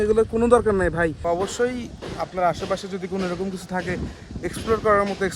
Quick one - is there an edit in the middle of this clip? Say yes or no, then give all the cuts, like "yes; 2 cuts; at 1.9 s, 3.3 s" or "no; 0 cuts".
yes; 1 cut; at 1.3 s